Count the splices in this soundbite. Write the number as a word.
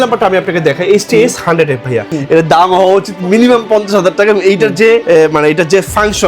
two